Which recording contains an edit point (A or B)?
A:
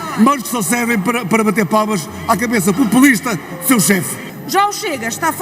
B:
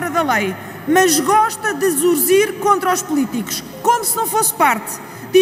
A